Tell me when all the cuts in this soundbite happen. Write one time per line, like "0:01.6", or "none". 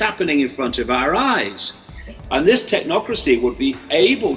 none